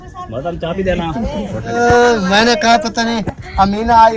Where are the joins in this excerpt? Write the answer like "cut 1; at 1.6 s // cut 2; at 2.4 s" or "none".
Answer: cut 1; at 1.7 s

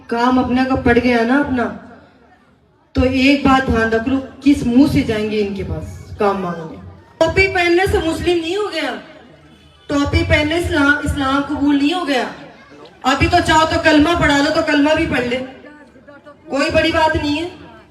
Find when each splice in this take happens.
cut 1; at 7.2 s

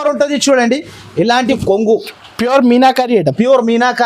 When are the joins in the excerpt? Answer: cut 1; at 1.5 s

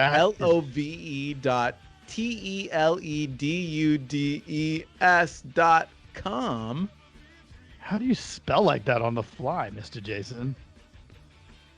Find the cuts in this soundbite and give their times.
cut 1; at 10.6 s

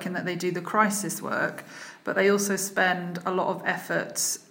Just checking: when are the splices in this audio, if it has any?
none

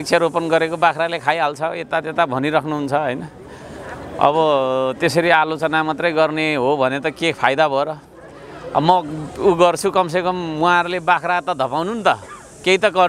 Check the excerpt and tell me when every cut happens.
none

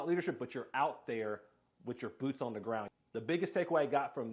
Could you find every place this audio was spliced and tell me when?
cut 1; at 2.9 s

